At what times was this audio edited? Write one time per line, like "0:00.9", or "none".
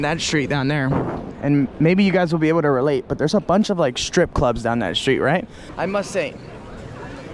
0:05.6